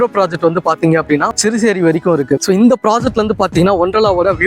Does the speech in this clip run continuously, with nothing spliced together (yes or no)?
no